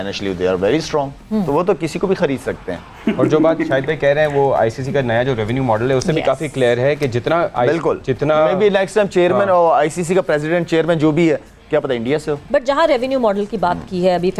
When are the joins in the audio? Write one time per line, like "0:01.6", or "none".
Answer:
none